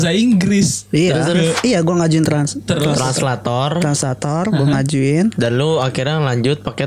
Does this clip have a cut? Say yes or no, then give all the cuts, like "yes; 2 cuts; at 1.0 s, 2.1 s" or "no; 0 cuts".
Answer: yes; 1 cut; at 1.6 s